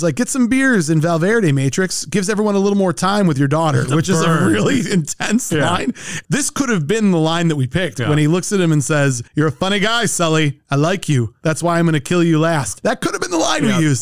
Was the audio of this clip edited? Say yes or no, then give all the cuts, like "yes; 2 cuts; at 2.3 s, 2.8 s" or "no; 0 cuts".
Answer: no; 0 cuts